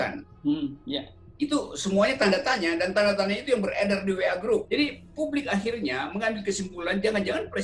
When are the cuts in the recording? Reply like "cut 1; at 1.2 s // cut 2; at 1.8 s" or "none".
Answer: cut 1; at 4.7 s